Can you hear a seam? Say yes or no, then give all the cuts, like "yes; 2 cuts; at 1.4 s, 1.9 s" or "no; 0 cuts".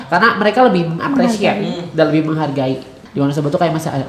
yes; 1 cut; at 3.0 s